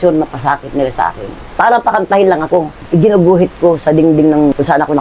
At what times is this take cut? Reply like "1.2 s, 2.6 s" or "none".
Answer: 1.5 s, 2.8 s